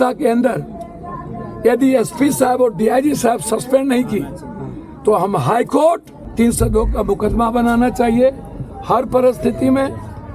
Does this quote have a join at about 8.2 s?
no; 1 cut; at 6.2 s

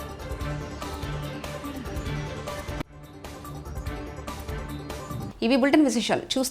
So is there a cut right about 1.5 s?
no; 0 cuts

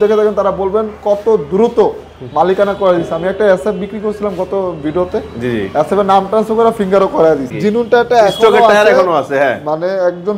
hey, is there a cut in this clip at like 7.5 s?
yes; 1 cut; at 7.5 s

